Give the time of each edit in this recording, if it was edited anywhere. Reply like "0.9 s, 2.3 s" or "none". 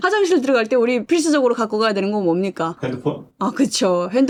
none